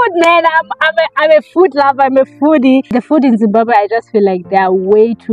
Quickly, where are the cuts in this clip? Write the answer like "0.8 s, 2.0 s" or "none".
3.0 s